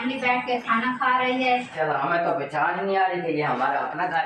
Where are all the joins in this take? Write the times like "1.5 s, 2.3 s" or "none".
1.7 s

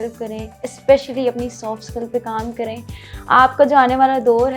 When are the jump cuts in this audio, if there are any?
none

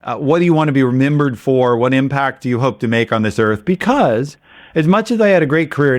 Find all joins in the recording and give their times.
none

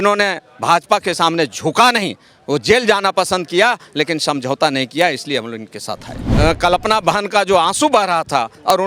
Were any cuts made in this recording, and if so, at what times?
6.2 s

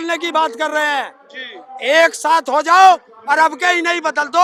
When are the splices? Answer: none

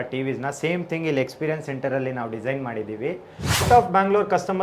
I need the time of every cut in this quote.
3.6 s

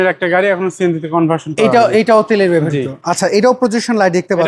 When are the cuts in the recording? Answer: none

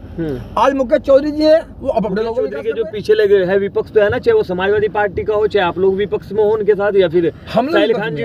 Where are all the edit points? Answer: 2.5 s

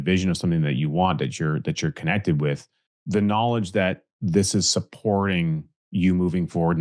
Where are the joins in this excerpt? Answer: none

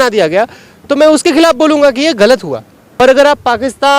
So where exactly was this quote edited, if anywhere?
2.8 s

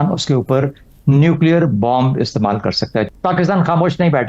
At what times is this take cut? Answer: 3.1 s

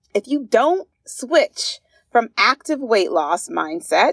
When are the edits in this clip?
none

